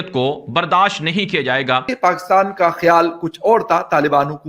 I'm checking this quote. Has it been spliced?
yes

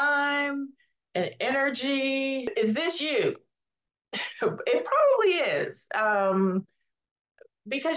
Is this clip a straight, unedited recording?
no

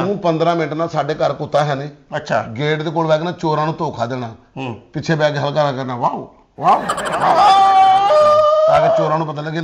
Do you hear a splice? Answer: no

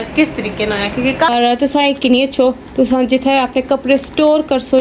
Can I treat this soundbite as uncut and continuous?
no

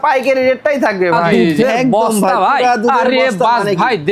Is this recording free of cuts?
no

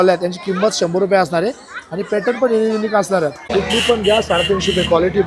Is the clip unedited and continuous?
no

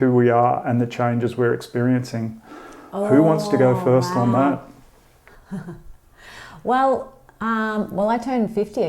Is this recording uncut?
yes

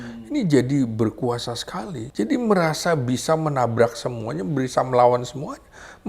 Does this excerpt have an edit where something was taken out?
yes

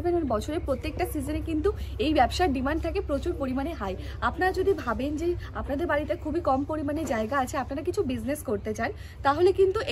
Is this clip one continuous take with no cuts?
yes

